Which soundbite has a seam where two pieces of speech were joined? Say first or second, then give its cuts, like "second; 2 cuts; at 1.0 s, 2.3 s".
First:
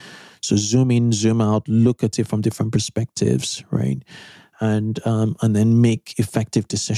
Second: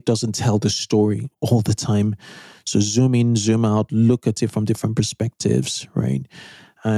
second; 1 cut; at 1.3 s